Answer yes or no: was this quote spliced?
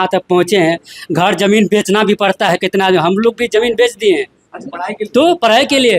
no